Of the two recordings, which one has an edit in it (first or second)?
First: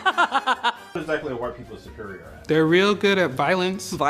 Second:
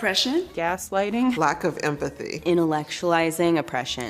first